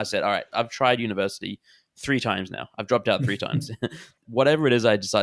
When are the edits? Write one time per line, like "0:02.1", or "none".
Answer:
0:04.2